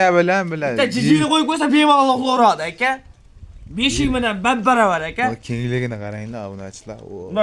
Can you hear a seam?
no; 0 cuts

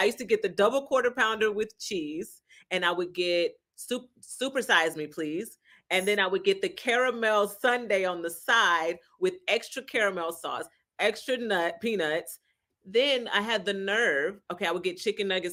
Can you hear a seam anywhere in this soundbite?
no; 0 cuts

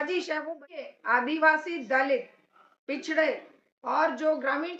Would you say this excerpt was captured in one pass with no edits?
no; 1 cut; at 0.9 s

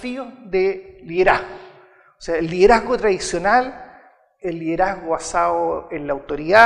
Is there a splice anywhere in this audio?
no; 0 cuts

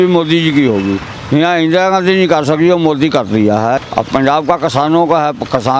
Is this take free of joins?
no; 2 cuts; at 1.1 s, 3.8 s

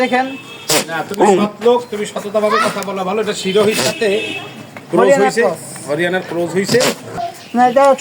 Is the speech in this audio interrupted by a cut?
yes; 1 cut; at 7.1 s

